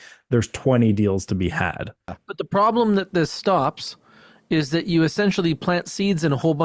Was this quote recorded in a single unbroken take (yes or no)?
no